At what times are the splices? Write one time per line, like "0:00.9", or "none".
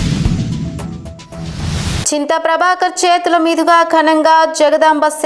0:02.0